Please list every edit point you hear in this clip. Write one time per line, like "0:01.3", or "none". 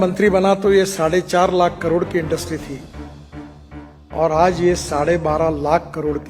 none